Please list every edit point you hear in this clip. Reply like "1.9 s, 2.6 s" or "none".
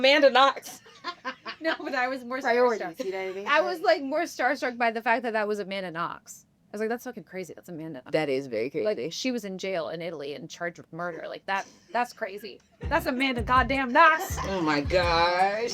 14.3 s